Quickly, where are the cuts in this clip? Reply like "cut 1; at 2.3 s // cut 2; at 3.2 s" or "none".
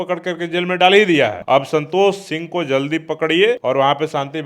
cut 1; at 1.4 s // cut 2; at 3.6 s

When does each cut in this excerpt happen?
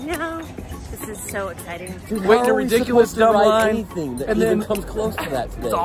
cut 1; at 2.1 s

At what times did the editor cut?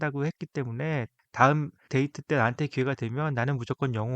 cut 1; at 1.2 s // cut 2; at 1.8 s

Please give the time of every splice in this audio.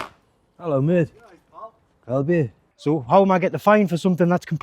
cut 1; at 2.6 s

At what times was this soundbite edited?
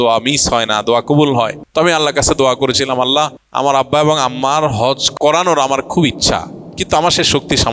cut 1; at 1.6 s // cut 2; at 3.4 s // cut 3; at 5.1 s

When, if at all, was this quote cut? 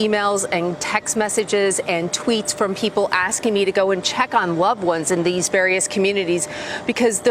none

